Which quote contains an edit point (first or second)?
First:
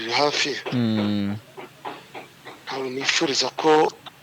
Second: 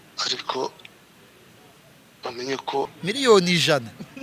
second